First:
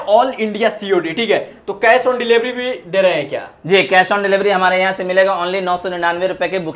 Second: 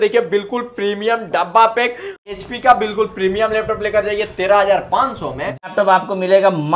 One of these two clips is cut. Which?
second; 2 cuts; at 2.2 s, 5.7 s

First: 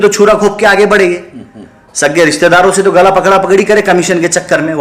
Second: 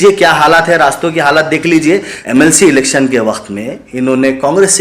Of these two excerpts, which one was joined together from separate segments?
second; 1 cut; at 2.1 s

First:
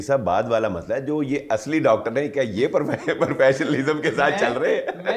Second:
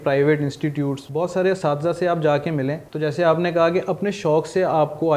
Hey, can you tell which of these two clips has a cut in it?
second; 2 cuts; at 1.0 s, 2.8 s

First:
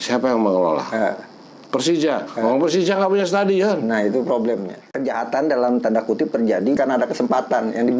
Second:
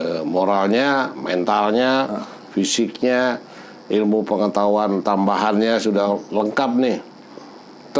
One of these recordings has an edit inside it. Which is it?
first; 1 cut; at 4.9 s

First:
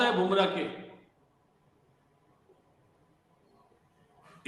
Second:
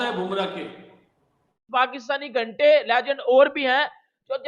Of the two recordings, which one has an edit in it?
second; 1 cut; at 1.6 s

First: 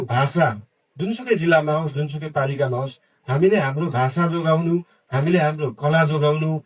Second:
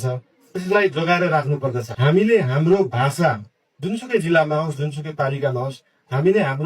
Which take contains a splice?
second; 1 cut; at 1.9 s

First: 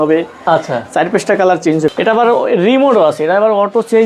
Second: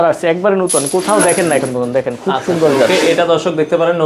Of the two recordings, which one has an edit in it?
first; 1 cut; at 1.9 s

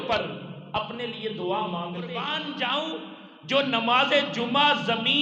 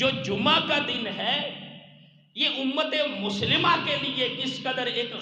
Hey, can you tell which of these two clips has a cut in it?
first; 1 cut; at 2.3 s

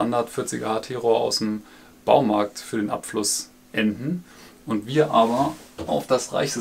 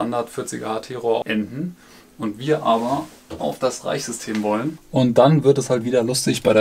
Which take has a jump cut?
second; 2 cuts; at 1.2 s, 4.8 s

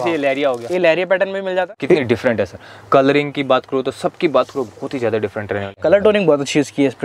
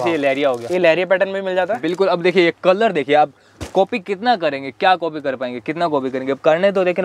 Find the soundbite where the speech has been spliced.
first; 2 cuts; at 1.7 s, 5.7 s

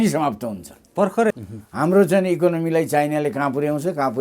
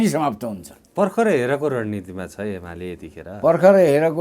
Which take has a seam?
first; 1 cut; at 1.3 s

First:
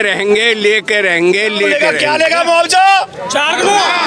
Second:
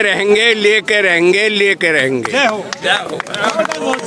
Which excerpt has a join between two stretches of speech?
first; 1 cut; at 1.7 s

